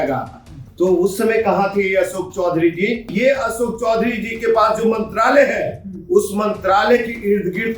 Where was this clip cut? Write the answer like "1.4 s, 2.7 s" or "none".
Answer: 3.1 s